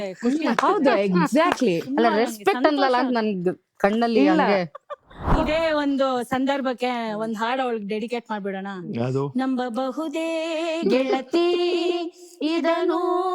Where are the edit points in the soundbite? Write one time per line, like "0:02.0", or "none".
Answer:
0:05.4